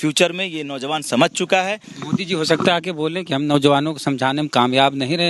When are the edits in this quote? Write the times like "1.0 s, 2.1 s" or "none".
1.9 s